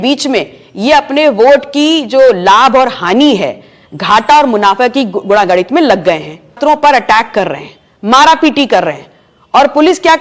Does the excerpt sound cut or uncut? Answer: cut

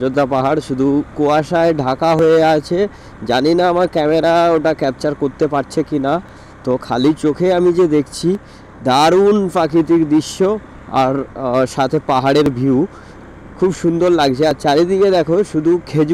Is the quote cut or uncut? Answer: uncut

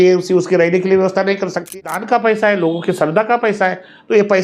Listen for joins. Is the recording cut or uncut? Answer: cut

